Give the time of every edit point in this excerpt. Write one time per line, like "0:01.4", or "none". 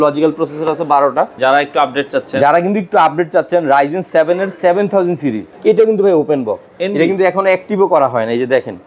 0:01.3
0:05.5